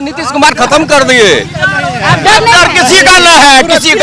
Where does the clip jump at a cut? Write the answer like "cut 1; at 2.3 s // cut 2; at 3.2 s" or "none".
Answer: none